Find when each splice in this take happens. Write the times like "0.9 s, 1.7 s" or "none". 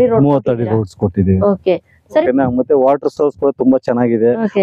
2.2 s